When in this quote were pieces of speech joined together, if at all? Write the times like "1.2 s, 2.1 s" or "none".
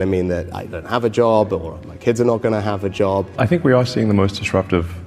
3.3 s